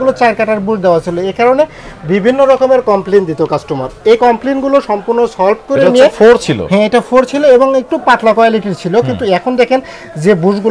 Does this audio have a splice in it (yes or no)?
no